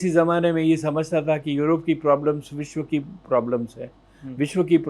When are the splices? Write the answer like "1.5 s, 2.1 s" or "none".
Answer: none